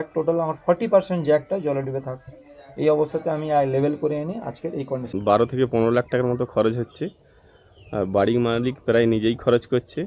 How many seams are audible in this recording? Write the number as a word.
one